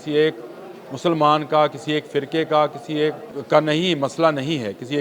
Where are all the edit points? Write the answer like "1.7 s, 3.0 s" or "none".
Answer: 3.3 s